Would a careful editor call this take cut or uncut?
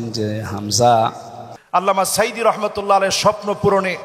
cut